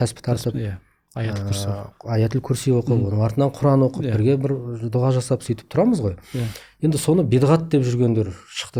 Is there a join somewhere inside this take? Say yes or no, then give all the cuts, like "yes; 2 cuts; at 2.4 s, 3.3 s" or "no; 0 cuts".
no; 0 cuts